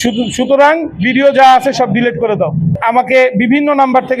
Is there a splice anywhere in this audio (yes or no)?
yes